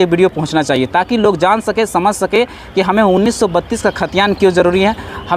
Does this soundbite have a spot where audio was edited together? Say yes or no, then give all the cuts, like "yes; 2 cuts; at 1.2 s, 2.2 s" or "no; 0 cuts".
no; 0 cuts